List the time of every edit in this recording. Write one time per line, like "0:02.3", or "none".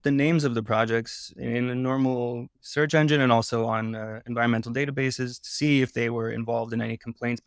0:02.5